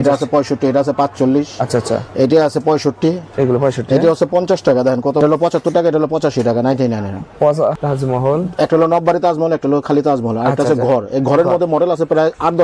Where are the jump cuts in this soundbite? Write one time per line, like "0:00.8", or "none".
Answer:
0:05.2
0:07.8